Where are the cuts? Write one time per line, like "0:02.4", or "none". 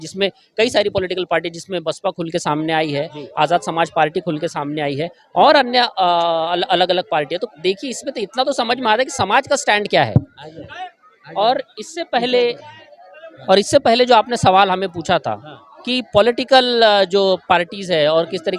none